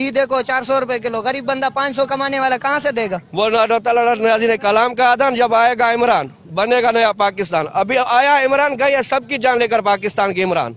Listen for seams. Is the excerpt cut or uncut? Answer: cut